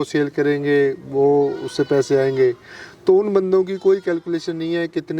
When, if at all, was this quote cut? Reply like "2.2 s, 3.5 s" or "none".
none

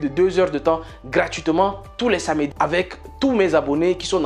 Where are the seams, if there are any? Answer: 2.5 s

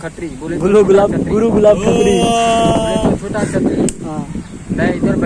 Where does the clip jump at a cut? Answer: none

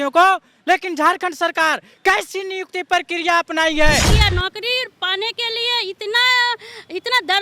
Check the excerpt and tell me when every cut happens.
4.1 s

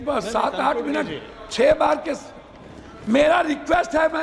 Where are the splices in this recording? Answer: none

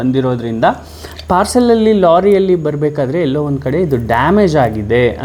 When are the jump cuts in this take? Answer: none

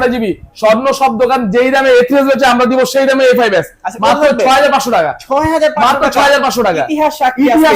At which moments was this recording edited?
none

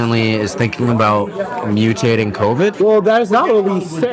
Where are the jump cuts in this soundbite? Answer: 2.7 s

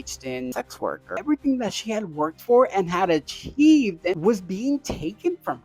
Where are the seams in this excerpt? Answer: 1.1 s, 4.2 s

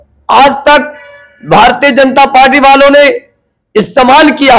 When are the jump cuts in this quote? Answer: none

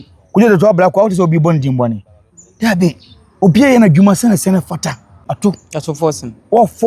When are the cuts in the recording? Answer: 5.2 s

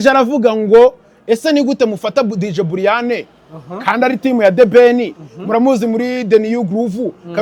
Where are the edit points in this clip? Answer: none

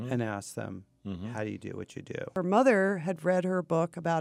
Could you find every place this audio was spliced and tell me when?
2.3 s

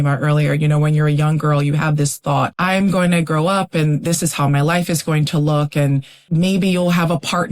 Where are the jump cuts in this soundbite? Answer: 2.5 s, 6.1 s

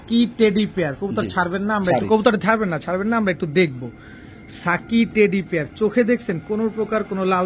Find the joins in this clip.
none

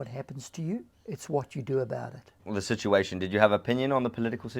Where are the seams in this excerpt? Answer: 0.9 s, 2.3 s

